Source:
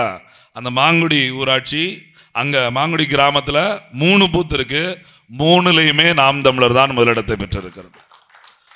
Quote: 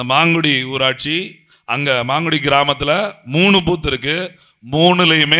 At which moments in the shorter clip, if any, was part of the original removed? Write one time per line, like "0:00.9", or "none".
none